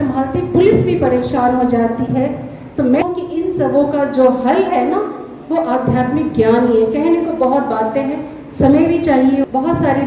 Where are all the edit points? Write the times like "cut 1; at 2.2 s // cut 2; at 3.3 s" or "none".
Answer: none